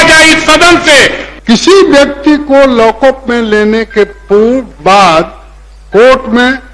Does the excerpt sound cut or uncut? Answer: cut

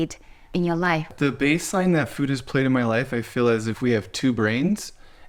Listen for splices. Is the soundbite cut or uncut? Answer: uncut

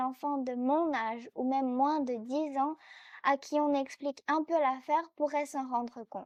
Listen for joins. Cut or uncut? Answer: uncut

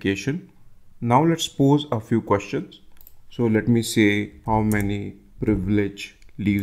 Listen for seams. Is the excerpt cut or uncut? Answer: uncut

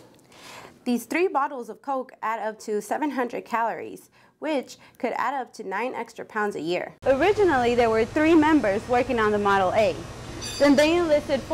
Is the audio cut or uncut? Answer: cut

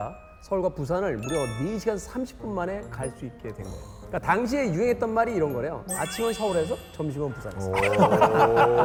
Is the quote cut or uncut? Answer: uncut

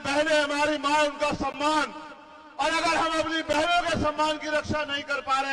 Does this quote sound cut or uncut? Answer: uncut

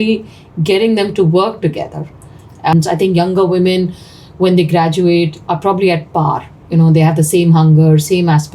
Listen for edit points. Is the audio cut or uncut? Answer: cut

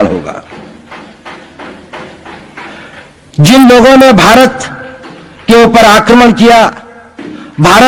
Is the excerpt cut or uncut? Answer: uncut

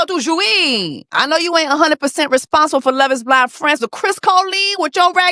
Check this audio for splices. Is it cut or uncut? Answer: cut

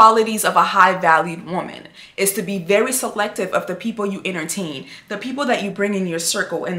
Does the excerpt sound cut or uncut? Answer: uncut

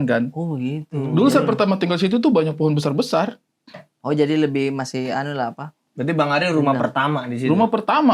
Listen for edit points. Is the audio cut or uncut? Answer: uncut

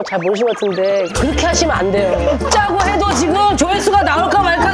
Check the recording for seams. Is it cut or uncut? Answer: uncut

